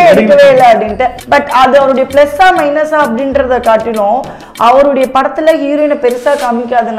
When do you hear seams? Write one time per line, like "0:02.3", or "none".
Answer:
0:01.1